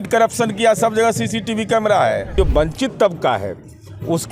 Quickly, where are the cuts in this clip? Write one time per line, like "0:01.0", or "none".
0:02.3